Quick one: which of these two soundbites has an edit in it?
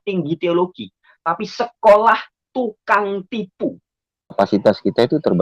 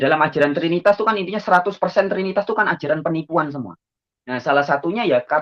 first; 1 cut; at 4.3 s

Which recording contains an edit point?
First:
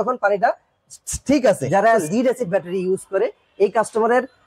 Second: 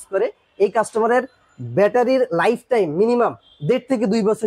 first; 1 cut; at 1.8 s

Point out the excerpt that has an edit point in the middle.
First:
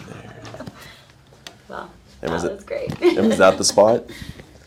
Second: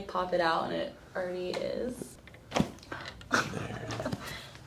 second; 1 cut; at 2.1 s

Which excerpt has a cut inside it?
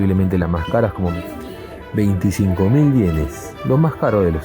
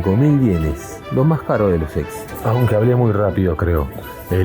first; 1 cut; at 1.6 s

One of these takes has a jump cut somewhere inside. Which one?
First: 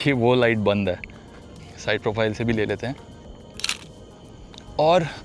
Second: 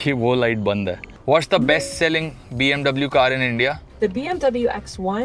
second; 2 cuts; at 1.1 s, 3.9 s

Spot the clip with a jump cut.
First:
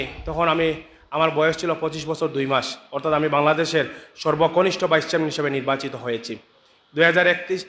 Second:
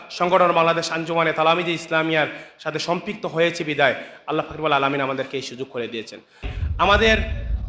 second; 1 cut; at 6.5 s

